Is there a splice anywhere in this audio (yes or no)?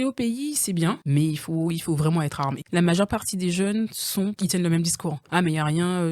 yes